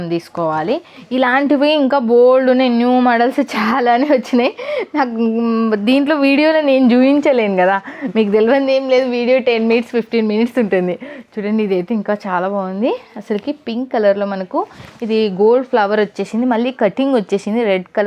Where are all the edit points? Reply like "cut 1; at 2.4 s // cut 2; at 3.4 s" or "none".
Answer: cut 1; at 0.9 s